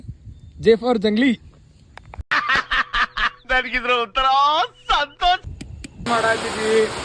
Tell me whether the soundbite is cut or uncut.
cut